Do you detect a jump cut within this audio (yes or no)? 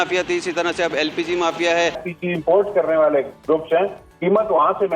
yes